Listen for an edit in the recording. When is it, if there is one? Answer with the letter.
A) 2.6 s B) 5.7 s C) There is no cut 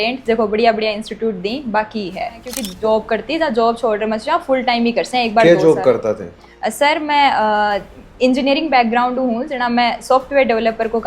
A